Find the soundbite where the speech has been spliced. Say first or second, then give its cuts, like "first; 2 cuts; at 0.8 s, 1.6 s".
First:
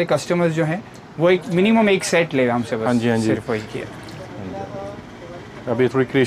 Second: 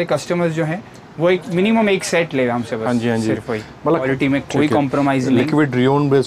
second; 1 cut; at 4.0 s